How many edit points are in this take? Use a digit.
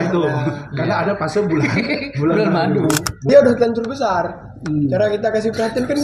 1